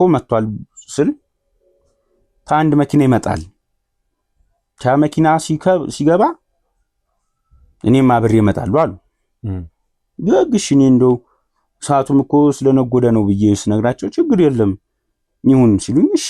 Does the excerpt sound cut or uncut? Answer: uncut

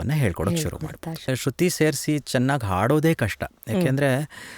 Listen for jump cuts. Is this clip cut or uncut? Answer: cut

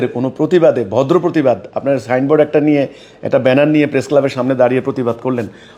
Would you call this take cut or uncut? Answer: uncut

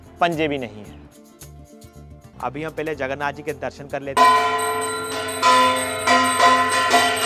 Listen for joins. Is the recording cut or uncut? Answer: uncut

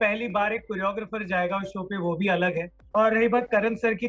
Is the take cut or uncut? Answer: cut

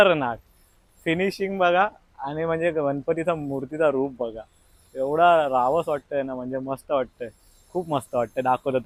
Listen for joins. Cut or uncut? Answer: uncut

